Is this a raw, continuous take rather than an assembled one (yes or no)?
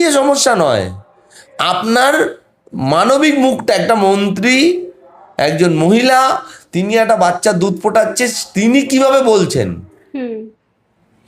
yes